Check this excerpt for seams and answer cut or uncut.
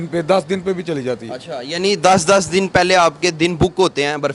uncut